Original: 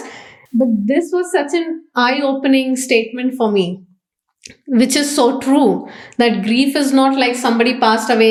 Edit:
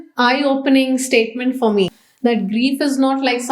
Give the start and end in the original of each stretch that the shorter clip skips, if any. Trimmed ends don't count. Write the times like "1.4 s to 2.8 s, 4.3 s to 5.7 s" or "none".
3.8 s to 6.0 s